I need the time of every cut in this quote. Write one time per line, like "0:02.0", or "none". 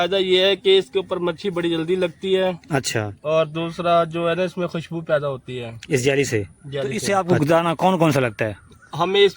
0:07.0